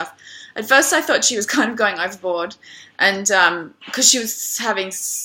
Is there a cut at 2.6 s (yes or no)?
yes